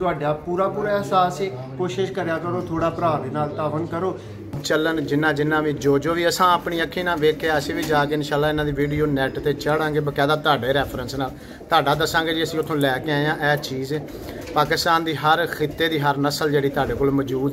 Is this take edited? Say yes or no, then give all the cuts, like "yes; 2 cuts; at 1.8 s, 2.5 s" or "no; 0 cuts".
yes; 1 cut; at 4.6 s